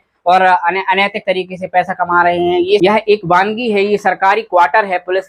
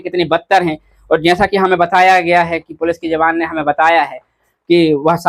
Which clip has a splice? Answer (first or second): first